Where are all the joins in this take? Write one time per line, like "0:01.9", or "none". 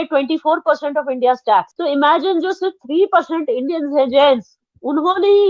0:01.7

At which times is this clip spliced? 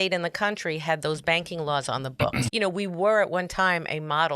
0:02.4

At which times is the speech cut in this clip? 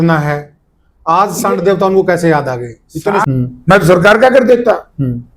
0:03.2

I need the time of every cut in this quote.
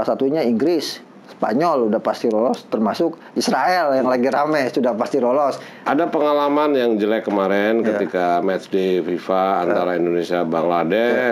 0:05.7

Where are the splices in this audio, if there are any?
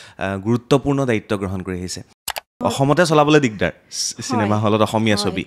0:02.2

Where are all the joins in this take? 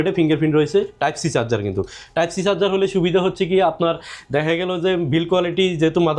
none

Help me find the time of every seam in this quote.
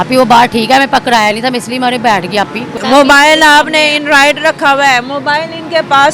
0:02.7

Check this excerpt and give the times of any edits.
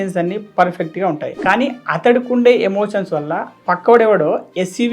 0:03.5

